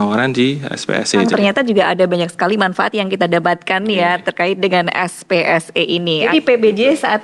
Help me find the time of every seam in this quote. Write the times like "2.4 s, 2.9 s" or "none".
1.3 s, 6.2 s